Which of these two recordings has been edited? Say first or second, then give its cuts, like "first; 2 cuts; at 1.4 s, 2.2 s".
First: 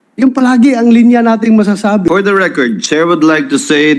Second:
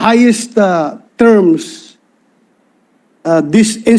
first; 1 cut; at 2.1 s